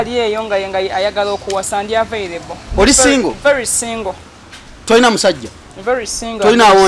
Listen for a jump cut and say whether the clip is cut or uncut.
uncut